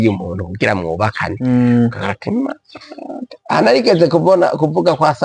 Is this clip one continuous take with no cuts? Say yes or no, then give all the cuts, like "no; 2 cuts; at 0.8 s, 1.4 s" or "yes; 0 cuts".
yes; 0 cuts